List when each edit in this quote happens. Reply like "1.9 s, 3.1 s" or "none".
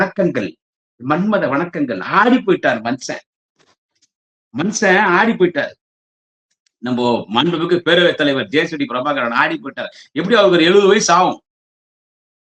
none